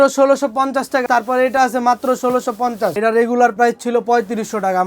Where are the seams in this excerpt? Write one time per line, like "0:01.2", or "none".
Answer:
0:01.0
0:03.0